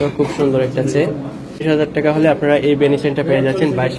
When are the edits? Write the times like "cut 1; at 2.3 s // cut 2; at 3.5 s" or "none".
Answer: cut 1; at 1.6 s